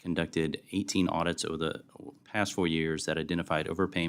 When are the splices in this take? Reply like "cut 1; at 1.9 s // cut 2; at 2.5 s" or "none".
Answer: none